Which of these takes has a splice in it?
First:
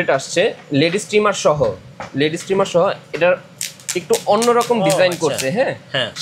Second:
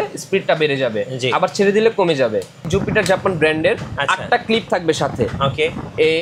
second; 1 cut; at 2.7 s

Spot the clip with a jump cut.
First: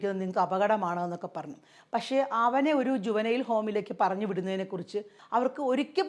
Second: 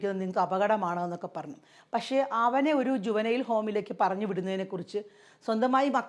first; 1 cut; at 5.2 s

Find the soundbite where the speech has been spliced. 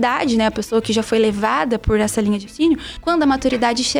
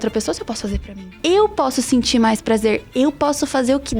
second; 1 cut; at 1.0 s

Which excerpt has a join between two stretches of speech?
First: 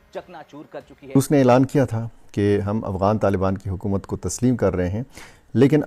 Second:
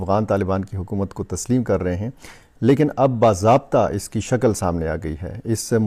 first; 1 cut; at 1.2 s

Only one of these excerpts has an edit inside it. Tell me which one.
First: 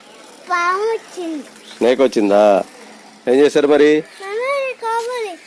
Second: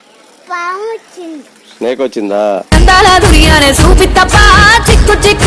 second; 1 cut; at 2.7 s

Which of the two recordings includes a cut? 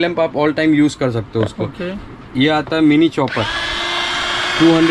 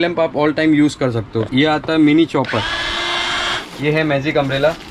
second; 2 cuts; at 1.4 s, 3.6 s

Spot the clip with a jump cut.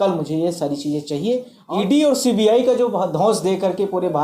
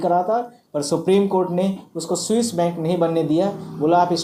first; 1 cut; at 1.5 s

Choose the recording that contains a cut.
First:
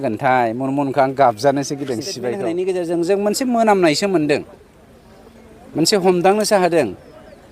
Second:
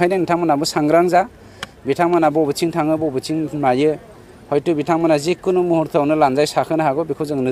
first; 1 cut; at 2.3 s

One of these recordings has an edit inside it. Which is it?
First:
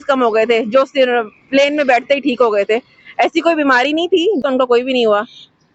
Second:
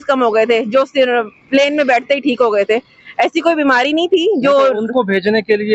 first; 1 cut; at 4.4 s

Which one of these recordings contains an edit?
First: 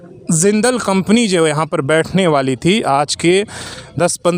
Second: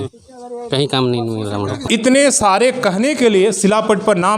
second; 1 cut; at 1.9 s

